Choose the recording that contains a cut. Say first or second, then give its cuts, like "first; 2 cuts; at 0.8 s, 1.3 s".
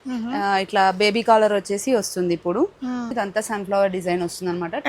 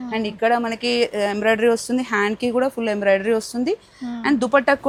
first; 1 cut; at 3.1 s